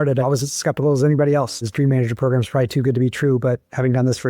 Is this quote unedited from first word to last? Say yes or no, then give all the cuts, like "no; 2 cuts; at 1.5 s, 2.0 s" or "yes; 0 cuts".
no; 1 cut; at 1.6 s